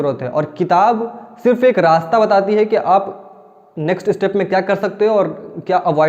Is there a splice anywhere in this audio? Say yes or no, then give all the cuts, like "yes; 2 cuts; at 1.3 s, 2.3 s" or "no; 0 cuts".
no; 0 cuts